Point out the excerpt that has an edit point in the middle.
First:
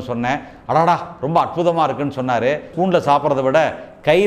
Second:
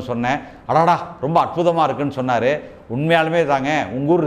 first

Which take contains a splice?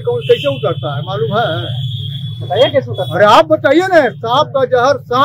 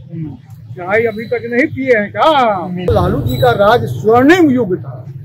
second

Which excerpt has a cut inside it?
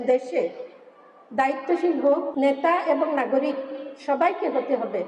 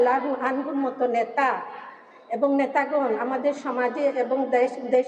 first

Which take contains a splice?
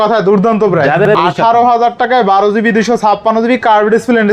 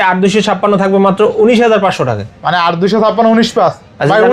first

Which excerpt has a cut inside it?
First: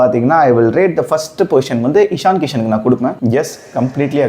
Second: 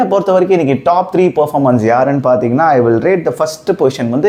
first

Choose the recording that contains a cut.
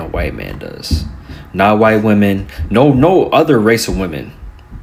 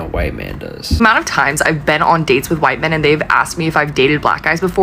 second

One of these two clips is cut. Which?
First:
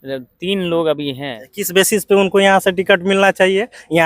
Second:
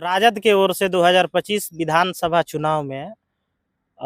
first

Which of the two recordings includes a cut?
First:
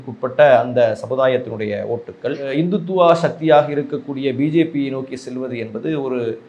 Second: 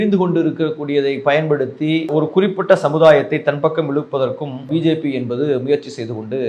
second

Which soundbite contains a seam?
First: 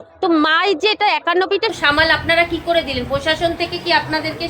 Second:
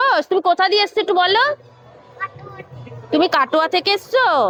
first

